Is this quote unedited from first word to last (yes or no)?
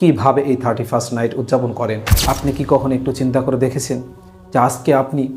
no